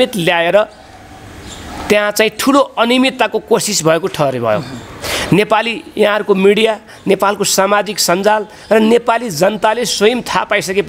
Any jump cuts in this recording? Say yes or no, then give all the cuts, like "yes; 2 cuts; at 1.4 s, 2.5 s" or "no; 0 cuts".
no; 0 cuts